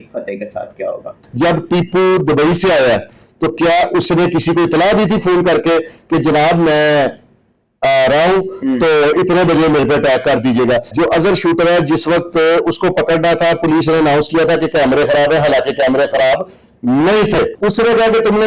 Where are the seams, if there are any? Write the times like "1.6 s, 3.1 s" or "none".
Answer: 1.2 s, 10.9 s, 17.5 s